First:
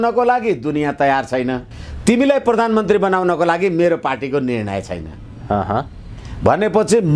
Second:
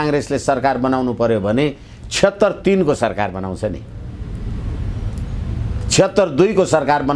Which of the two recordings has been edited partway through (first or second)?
first